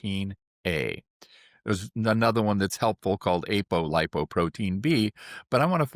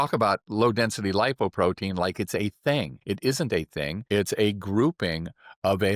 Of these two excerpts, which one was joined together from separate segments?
second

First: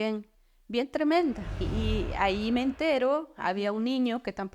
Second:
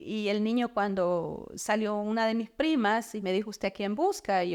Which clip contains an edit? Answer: first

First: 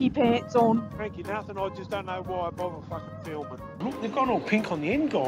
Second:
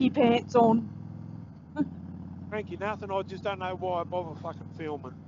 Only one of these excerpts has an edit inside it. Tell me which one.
first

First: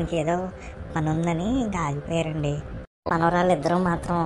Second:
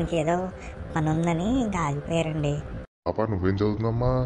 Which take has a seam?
first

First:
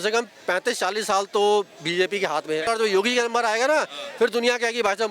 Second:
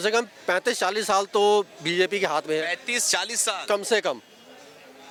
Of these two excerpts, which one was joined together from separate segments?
first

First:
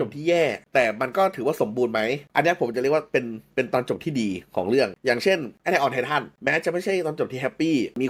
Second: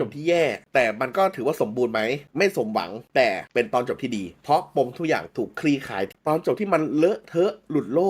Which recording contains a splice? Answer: second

